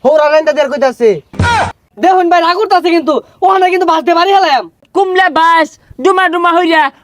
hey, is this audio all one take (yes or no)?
no